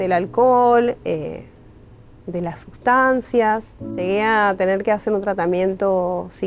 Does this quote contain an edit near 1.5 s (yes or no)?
no